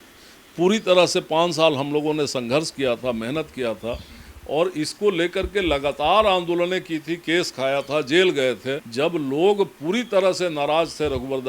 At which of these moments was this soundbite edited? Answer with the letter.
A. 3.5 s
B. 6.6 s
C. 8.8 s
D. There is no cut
C